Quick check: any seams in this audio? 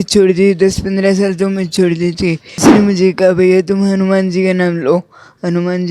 yes; 1 cut; at 2.6 s

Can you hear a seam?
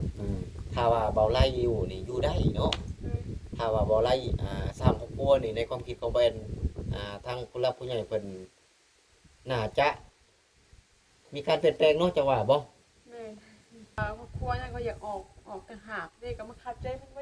yes; 1 cut; at 14.0 s

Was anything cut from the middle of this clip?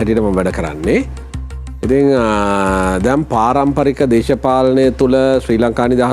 no; 0 cuts

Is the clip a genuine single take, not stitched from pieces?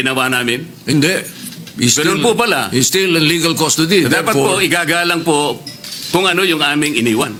yes; 0 cuts

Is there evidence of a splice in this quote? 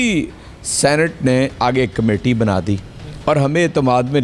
no; 0 cuts

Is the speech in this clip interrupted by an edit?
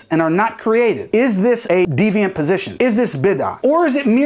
yes; 1 cut; at 1.9 s

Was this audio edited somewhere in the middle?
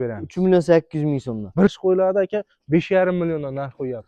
yes; 1 cut; at 1.7 s

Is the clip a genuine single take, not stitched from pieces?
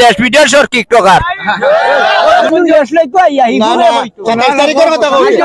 no; 1 cut; at 2.5 s

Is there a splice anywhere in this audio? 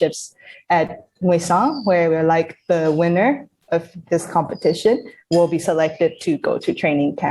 no; 0 cuts

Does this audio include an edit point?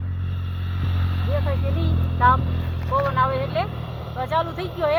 no; 0 cuts

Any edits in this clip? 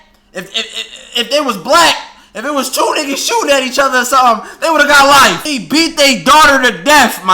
yes; 1 cut; at 5.5 s

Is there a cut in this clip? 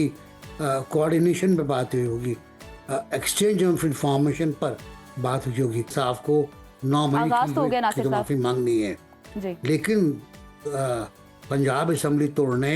yes; 1 cut; at 5.9 s

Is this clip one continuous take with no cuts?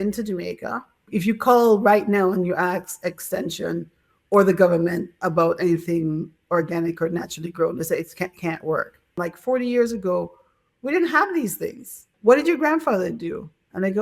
no; 3 cuts; at 1.1 s, 9.3 s, 12.1 s

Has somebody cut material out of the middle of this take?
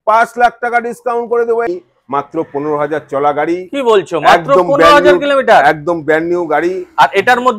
yes; 1 cut; at 1.7 s

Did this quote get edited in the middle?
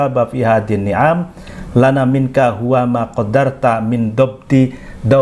no; 0 cuts

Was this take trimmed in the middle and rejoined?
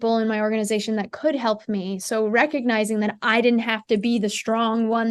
no; 0 cuts

